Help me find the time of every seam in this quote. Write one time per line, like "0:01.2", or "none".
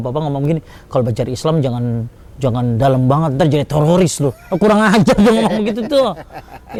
none